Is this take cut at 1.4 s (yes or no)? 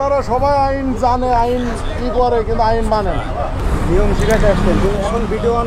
no